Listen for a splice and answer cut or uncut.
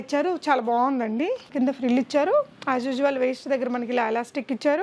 cut